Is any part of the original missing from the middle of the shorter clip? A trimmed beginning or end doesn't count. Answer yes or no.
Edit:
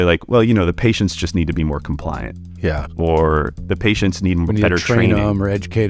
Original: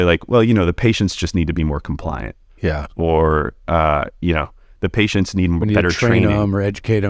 yes